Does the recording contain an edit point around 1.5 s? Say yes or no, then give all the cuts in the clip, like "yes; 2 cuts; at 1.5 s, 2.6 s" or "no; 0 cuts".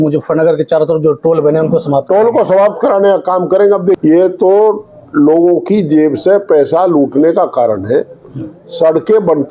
no; 1 cut; at 4.0 s